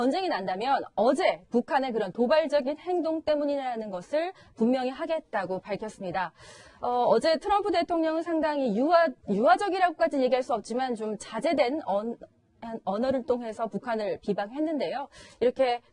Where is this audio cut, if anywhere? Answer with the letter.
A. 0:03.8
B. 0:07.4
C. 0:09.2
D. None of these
A